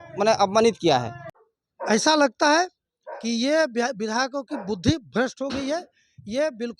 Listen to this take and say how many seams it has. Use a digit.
1